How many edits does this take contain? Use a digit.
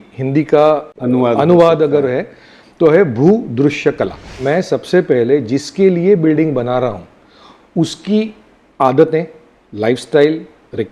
2